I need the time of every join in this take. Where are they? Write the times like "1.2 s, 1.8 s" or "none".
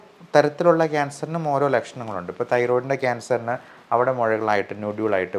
none